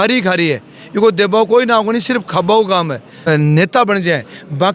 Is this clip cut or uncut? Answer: cut